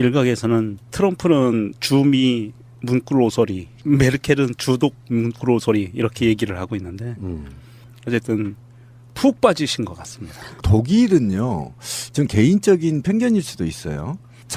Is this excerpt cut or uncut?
cut